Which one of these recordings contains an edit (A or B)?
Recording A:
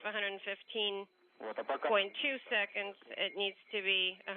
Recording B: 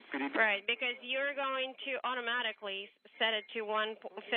A